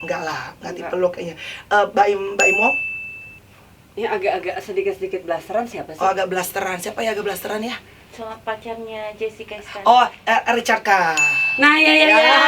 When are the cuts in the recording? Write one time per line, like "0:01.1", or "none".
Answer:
none